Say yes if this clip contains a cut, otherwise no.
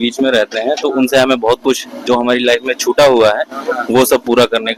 no